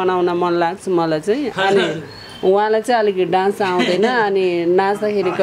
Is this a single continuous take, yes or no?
yes